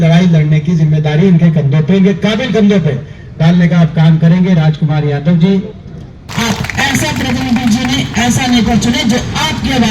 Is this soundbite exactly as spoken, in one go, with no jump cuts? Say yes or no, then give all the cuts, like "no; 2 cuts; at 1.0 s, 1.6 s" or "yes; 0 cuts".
no; 1 cut; at 6.2 s